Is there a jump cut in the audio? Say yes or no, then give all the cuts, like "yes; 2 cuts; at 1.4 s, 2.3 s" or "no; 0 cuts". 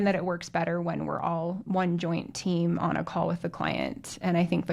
no; 0 cuts